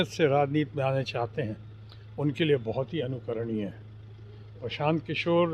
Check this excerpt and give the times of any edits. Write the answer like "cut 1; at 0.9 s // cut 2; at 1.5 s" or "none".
none